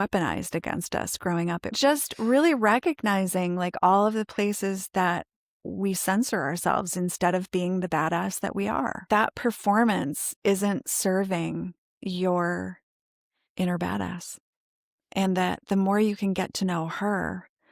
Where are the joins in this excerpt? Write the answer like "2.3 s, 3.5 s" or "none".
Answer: 1.8 s, 9.1 s